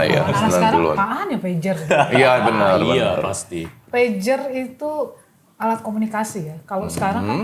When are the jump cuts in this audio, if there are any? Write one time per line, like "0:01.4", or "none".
none

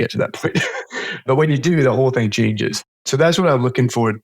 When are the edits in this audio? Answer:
0:01.2
0:03.0

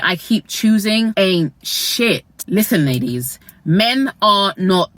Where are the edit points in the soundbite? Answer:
0:01.1
0:02.3

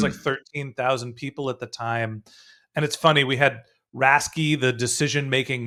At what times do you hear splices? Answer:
none

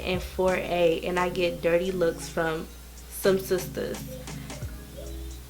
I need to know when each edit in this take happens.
none

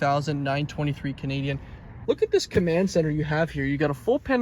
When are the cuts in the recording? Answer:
0:01.9

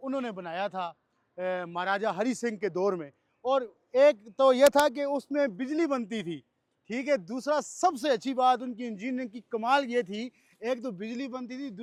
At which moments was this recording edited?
none

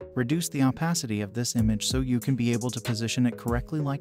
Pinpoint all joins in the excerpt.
none

